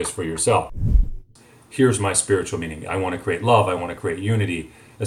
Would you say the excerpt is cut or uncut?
cut